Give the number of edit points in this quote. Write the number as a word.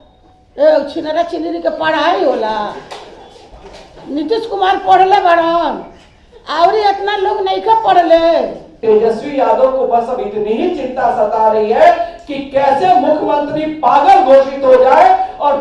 one